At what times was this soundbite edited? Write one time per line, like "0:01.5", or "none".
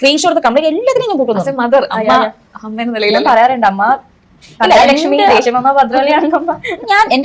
none